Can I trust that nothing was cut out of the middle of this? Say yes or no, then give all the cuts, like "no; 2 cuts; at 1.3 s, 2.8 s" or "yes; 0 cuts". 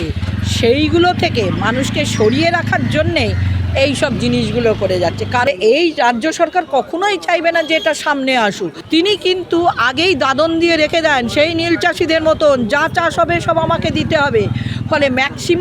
no; 2 cuts; at 5.5 s, 8.7 s